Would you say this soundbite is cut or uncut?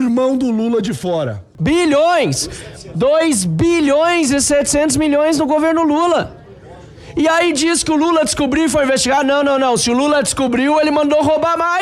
cut